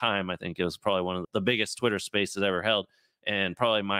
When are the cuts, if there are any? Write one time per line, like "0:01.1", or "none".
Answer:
0:01.2